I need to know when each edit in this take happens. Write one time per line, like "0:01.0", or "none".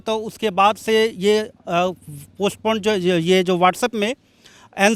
none